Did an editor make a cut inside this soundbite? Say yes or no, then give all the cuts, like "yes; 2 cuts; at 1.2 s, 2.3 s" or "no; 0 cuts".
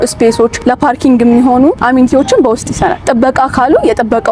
yes; 2 cuts; at 1.8 s, 3.0 s